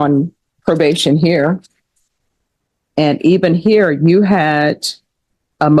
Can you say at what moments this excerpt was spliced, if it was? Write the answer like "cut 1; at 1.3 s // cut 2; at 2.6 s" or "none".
none